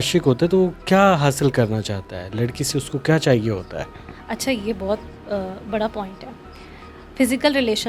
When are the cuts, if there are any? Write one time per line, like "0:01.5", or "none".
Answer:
none